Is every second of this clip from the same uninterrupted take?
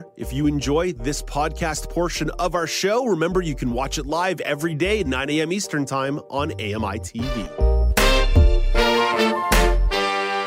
yes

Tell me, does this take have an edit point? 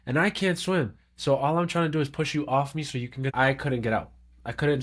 yes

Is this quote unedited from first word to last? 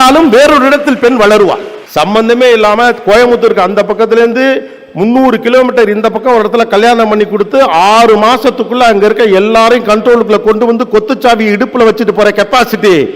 no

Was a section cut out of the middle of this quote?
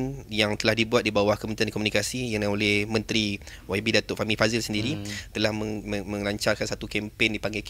no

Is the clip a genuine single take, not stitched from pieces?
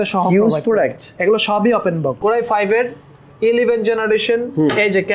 no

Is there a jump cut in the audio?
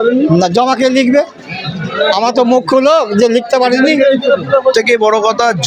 yes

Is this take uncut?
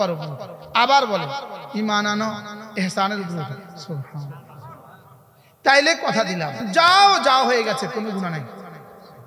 no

